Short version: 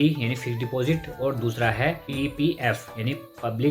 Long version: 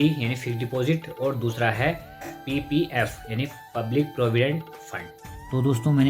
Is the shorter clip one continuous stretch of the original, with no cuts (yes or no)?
no